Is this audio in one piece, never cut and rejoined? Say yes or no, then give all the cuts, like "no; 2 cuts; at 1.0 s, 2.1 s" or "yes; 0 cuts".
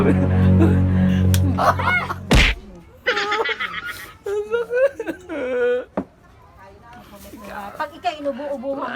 yes; 0 cuts